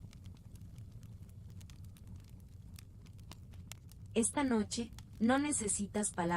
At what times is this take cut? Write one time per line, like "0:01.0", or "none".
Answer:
0:04.1